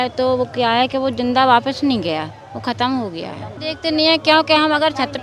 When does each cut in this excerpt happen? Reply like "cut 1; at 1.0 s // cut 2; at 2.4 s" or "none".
cut 1; at 3.6 s